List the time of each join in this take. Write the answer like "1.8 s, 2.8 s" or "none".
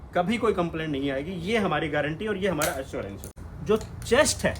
3.2 s